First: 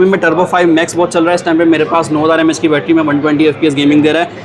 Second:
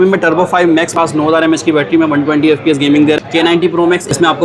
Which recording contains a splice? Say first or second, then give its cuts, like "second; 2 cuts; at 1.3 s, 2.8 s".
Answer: second; 2 cuts; at 0.9 s, 3.7 s